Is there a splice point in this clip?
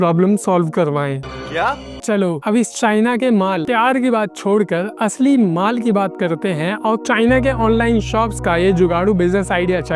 no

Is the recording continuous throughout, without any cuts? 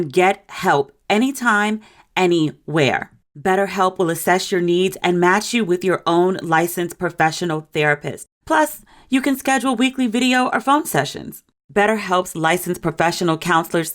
no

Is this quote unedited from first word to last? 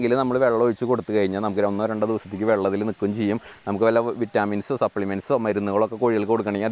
yes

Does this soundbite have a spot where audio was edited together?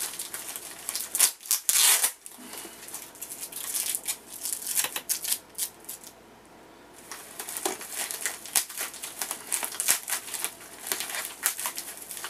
yes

